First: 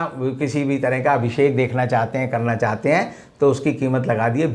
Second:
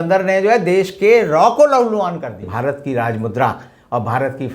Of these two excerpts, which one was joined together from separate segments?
second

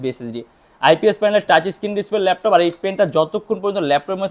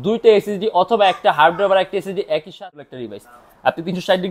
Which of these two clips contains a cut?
second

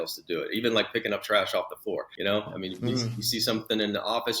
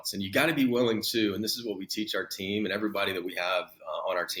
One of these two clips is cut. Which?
first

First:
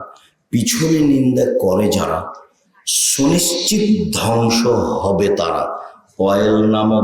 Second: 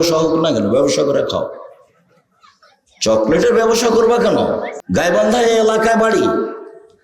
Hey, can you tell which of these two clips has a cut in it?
second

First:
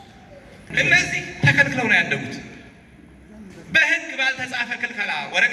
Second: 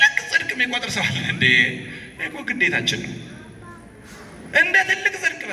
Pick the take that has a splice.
first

